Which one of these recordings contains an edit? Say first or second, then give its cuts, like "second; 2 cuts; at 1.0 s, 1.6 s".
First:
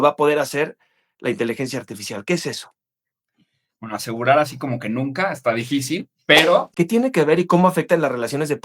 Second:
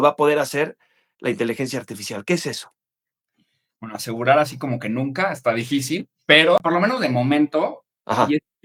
first; 1 cut; at 6.6 s